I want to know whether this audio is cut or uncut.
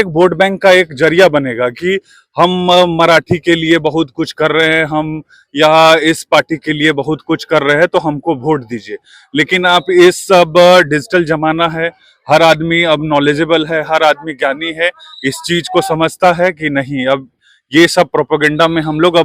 uncut